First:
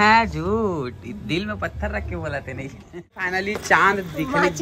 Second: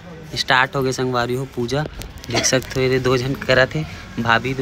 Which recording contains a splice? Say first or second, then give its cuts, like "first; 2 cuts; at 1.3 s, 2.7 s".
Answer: first; 1 cut; at 3.3 s